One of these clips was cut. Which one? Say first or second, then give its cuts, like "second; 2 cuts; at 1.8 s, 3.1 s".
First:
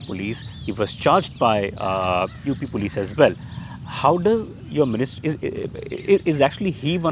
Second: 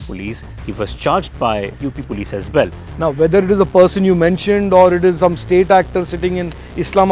second; 2 cuts; at 1.7 s, 2.8 s